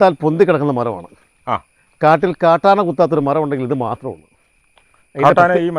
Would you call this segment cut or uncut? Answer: uncut